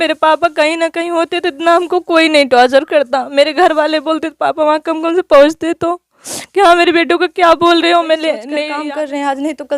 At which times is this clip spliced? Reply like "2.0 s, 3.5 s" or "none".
8.5 s